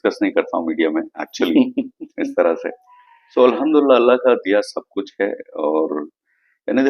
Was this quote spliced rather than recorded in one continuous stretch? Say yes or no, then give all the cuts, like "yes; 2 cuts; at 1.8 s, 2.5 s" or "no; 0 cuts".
no; 0 cuts